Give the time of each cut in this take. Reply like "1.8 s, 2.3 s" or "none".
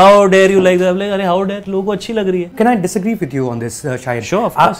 2.6 s

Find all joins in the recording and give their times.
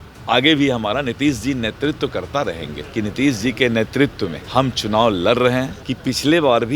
2.7 s, 4.3 s, 5.8 s

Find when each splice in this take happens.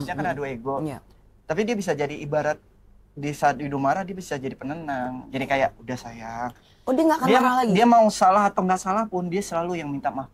none

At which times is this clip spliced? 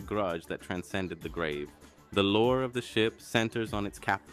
1.2 s

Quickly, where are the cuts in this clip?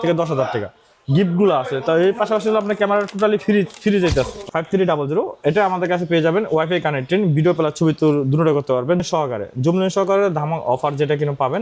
4.4 s, 9.0 s

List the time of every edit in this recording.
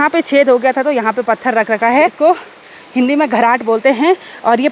2.1 s

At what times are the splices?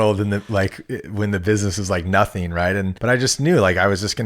2.9 s

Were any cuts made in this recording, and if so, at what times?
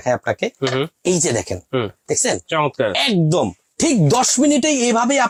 none

